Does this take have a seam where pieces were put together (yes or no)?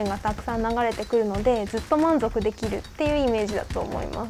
no